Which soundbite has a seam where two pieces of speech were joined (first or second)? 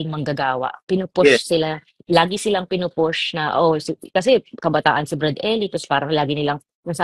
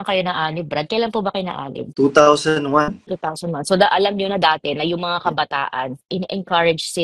second